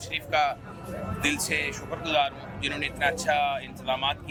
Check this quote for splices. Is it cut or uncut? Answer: uncut